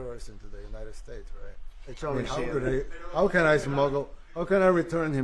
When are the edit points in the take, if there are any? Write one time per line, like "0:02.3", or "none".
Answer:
none